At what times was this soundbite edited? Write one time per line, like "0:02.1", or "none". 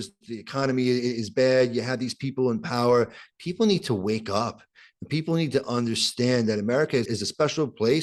0:07.1